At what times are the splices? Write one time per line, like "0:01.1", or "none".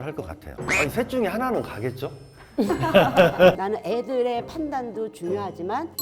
0:03.6